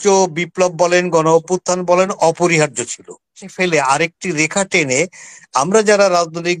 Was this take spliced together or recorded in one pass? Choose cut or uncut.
cut